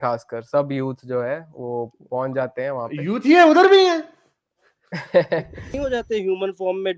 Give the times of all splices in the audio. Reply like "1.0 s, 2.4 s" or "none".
5.7 s